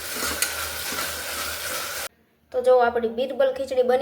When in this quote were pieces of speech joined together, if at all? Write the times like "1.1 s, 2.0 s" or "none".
2.1 s